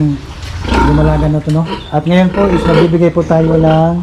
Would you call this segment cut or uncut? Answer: cut